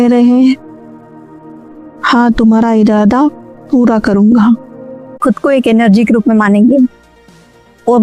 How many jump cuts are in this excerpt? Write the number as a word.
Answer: one